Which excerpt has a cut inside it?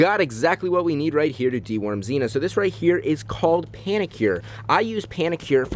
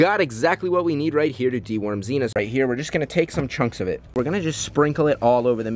second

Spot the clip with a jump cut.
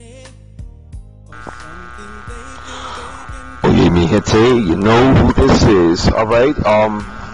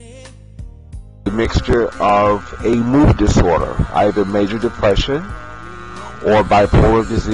first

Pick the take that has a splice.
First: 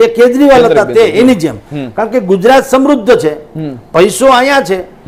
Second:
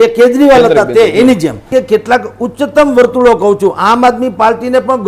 second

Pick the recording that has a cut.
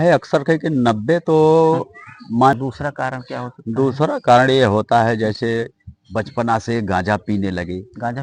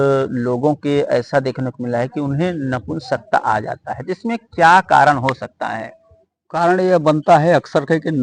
first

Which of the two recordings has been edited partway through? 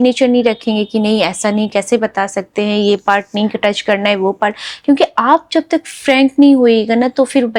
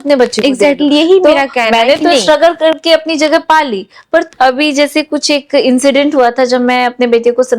second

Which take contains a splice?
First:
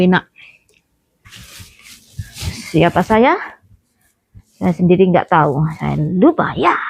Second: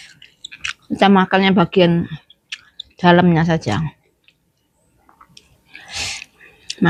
first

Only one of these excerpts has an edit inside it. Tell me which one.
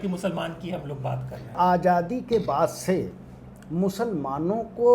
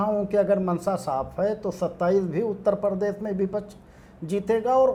first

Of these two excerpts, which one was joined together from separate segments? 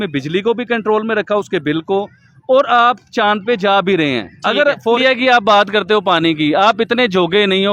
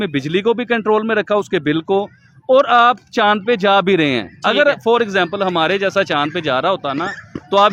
first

